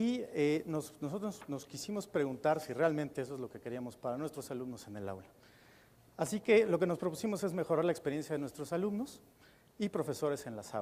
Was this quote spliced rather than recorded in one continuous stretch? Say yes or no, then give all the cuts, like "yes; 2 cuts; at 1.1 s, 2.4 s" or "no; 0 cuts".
yes; 1 cut; at 3.1 s